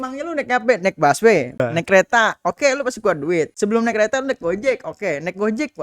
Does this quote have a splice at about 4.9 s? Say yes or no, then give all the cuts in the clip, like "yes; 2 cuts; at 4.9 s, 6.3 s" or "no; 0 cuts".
no; 2 cuts; at 1.6 s, 3.5 s